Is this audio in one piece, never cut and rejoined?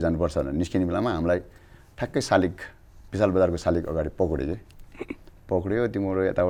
yes; 0 cuts

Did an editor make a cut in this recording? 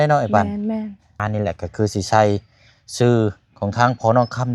yes; 1 cut; at 1.0 s

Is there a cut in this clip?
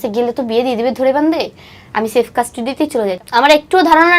yes; 1 cut; at 3.2 s

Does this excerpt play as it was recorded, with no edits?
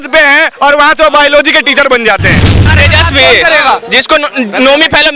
no; 1 cut; at 2.7 s

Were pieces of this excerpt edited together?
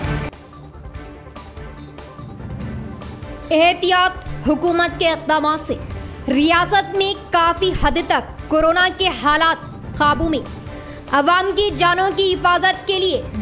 yes; 1 cut; at 2.9 s

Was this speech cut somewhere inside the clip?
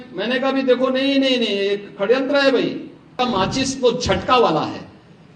yes; 1 cut; at 3.1 s

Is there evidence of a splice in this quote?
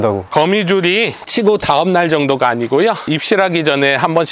no; 0 cuts

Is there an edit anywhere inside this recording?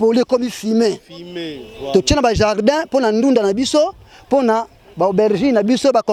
no; 0 cuts

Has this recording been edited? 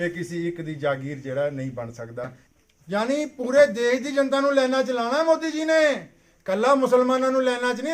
yes; 1 cut; at 2.4 s

